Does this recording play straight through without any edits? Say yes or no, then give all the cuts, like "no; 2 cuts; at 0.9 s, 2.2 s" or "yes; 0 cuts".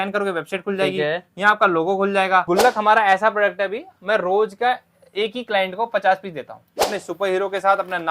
no; 2 cuts; at 2.4 s, 7.0 s